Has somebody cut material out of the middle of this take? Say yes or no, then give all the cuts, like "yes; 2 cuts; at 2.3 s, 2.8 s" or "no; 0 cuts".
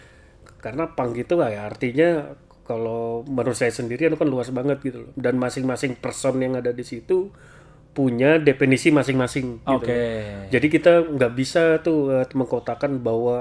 no; 0 cuts